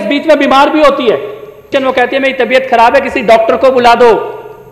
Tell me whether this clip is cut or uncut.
cut